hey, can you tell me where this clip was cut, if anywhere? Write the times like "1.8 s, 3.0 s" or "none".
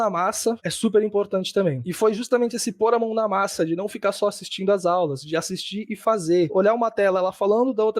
1.8 s, 6.5 s

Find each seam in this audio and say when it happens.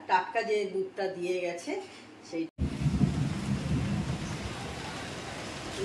2.5 s

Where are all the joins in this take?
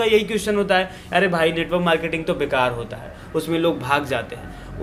none

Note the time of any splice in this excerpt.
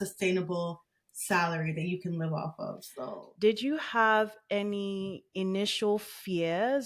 2.9 s

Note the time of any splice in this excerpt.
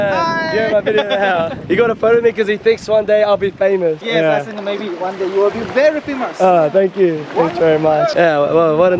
1.6 s, 4.0 s, 8.1 s

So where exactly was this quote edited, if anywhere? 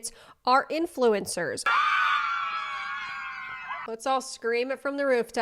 1.7 s, 3.8 s

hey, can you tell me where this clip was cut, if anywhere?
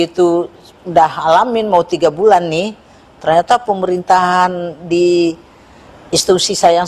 none

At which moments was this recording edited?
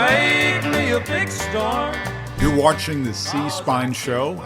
2.4 s

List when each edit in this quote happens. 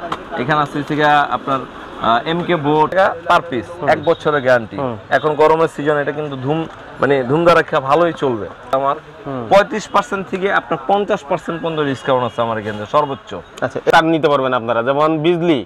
2.9 s, 8.7 s, 13.9 s

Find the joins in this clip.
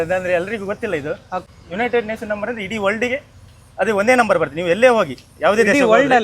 1.4 s

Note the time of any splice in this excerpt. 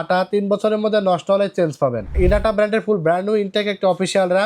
2.1 s

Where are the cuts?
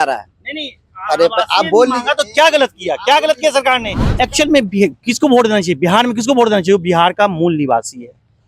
4.0 s

